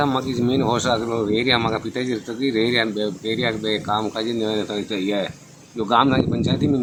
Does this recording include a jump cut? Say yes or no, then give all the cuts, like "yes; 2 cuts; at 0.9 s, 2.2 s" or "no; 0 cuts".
no; 0 cuts